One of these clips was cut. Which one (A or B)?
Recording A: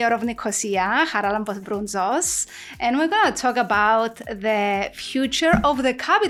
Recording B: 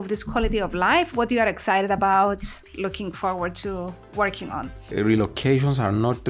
B